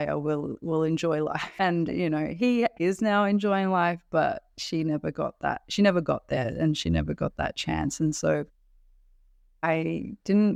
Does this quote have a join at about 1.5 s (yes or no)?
no